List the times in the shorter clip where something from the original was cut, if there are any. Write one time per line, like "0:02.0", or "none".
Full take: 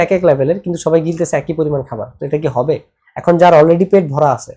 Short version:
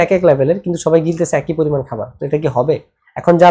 none